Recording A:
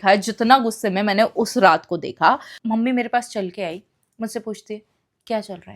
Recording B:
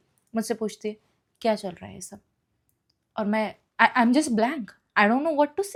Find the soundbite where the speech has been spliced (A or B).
A